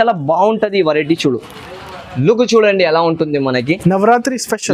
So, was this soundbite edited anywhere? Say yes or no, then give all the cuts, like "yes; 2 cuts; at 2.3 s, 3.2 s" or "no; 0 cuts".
no; 0 cuts